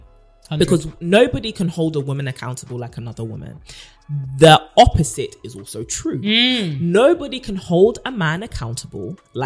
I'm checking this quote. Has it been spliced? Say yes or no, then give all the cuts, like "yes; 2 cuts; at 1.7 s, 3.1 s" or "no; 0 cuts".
no; 0 cuts